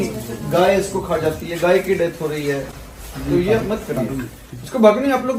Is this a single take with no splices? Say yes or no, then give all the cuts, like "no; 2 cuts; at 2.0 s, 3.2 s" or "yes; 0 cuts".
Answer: yes; 0 cuts